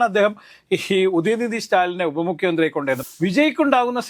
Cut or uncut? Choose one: cut